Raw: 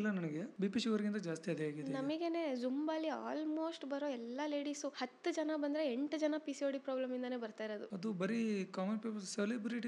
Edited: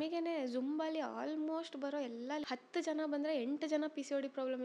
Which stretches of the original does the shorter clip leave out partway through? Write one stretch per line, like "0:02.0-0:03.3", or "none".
0:04.5-0:04.9